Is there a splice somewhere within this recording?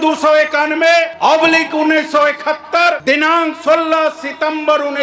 yes; 2 cuts; at 1.1 s, 3.0 s

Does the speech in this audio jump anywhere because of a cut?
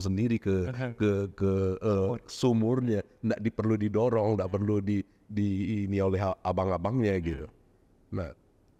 no; 0 cuts

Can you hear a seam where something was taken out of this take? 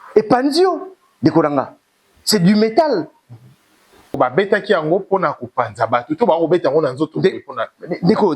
yes; 1 cut; at 4.2 s

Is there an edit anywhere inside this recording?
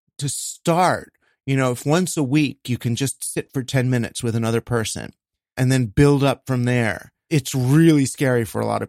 yes; 2 cuts; at 5.6 s, 7.2 s

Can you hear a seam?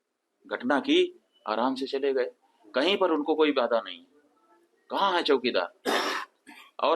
no; 0 cuts

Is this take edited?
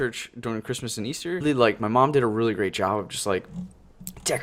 no; 0 cuts

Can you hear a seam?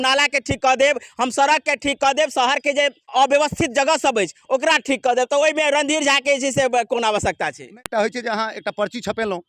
yes; 2 cuts; at 3.1 s, 7.8 s

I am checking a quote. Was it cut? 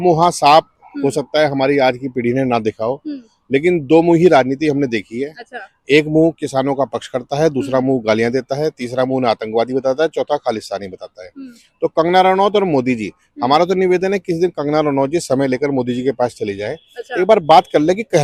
no; 0 cuts

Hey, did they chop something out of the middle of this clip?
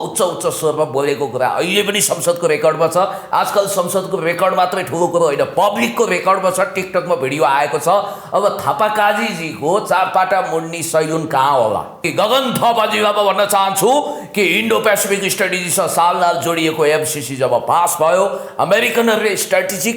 yes; 1 cut; at 12.1 s

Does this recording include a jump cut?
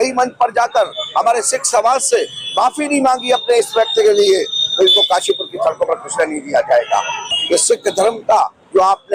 no; 0 cuts

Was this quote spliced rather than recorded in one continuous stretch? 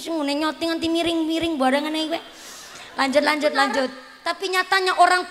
yes; 1 cut; at 4.1 s

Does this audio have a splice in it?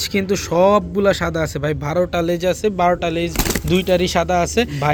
no; 0 cuts

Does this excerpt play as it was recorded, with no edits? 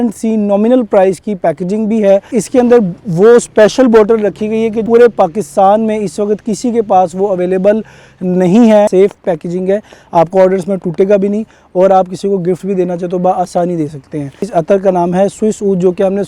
no; 4 cuts; at 2.3 s, 4.8 s, 8.9 s, 14.5 s

